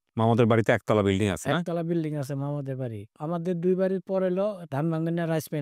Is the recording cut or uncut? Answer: cut